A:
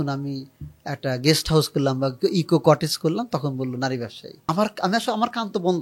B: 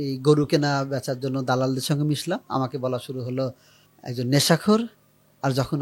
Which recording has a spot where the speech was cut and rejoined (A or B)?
A